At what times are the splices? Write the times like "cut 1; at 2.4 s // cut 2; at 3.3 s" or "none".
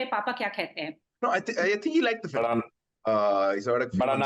cut 1; at 1.0 s